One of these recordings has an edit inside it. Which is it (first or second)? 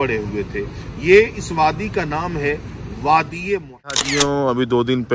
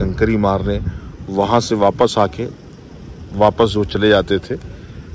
first